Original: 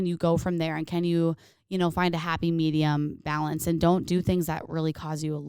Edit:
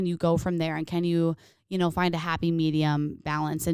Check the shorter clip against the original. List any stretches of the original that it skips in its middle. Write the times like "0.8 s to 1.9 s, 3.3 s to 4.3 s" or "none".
none